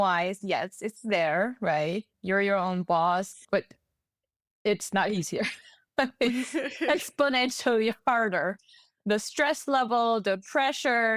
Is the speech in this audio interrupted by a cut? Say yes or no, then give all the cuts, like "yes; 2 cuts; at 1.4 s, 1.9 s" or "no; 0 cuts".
yes; 2 cuts; at 2.1 s, 3.4 s